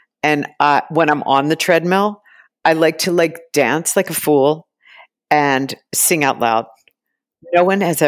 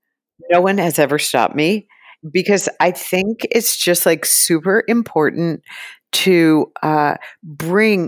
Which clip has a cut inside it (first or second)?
second